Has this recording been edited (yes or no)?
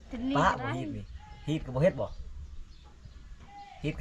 no